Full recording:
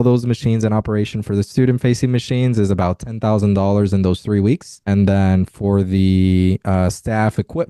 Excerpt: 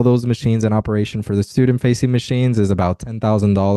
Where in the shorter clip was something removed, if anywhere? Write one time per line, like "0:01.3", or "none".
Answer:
none